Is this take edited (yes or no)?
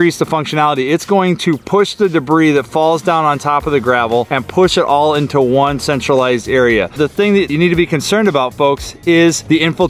no